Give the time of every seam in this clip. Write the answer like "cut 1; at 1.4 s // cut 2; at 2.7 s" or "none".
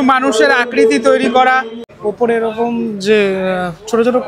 cut 1; at 1.7 s